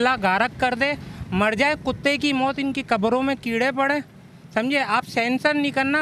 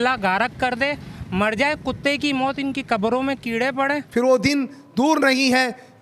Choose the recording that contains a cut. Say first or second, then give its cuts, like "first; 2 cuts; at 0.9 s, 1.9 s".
second; 1 cut; at 4.0 s